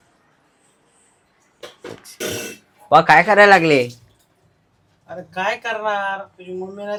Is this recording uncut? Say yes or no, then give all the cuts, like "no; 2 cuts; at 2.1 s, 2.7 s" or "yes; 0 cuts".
yes; 0 cuts